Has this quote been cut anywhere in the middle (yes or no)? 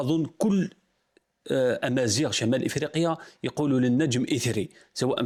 no